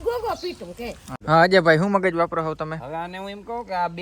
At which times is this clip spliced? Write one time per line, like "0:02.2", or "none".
0:01.1